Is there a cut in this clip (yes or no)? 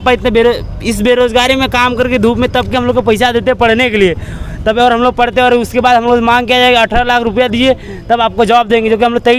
no